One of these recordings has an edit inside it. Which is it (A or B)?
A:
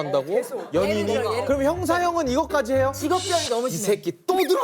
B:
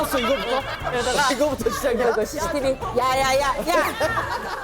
A